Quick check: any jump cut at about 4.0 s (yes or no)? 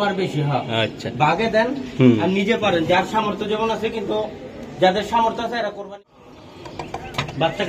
no